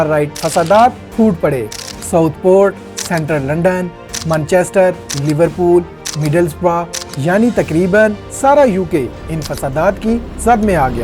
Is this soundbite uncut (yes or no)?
yes